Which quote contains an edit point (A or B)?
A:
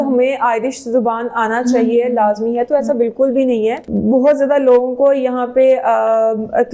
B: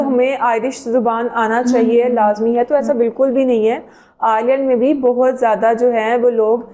A